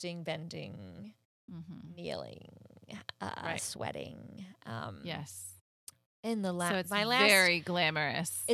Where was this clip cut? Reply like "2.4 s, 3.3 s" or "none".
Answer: none